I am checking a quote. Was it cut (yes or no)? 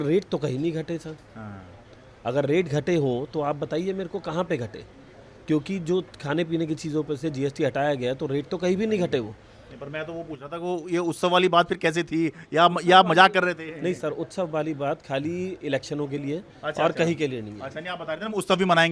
no